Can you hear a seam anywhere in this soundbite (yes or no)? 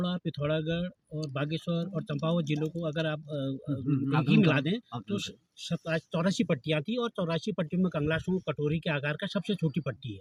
no